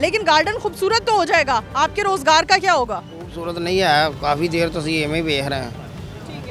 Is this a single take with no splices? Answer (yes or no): yes